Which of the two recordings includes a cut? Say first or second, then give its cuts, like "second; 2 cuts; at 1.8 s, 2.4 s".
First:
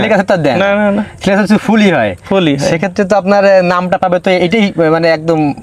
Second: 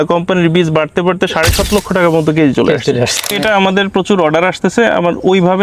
second; 1 cut; at 3.3 s